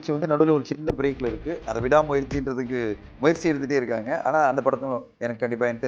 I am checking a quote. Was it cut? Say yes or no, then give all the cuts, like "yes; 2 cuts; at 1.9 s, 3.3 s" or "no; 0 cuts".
no; 0 cuts